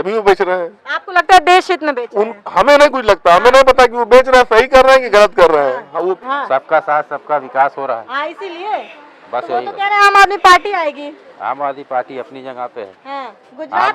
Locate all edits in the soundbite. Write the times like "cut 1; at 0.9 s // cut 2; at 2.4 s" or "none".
cut 1; at 6.1 s